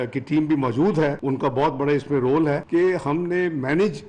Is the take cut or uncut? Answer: cut